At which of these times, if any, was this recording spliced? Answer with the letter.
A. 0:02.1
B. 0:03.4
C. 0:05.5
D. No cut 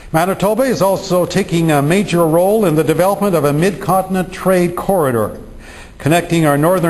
C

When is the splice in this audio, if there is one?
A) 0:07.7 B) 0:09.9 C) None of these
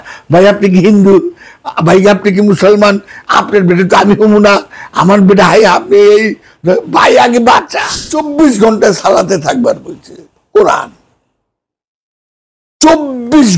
A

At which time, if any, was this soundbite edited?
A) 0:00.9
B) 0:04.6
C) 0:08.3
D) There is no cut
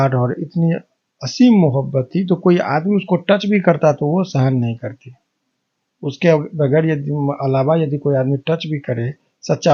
D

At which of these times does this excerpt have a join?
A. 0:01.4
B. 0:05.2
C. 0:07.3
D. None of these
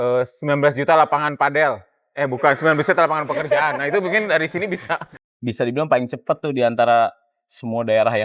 B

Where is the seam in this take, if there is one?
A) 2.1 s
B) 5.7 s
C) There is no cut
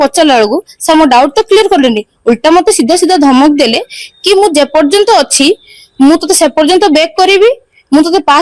C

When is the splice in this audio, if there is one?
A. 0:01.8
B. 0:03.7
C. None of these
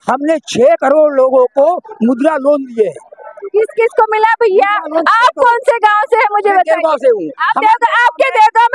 C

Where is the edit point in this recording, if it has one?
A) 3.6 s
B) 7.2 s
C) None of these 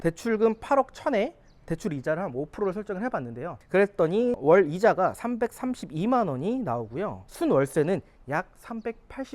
A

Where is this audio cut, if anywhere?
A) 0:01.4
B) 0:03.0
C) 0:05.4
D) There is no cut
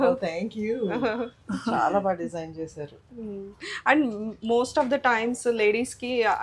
D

